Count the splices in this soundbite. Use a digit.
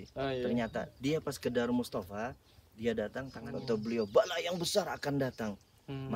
1